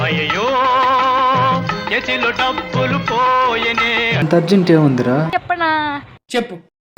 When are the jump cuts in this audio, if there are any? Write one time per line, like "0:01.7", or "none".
0:04.3